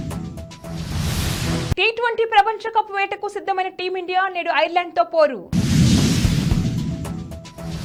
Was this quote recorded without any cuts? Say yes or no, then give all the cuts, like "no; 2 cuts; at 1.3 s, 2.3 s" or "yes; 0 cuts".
yes; 0 cuts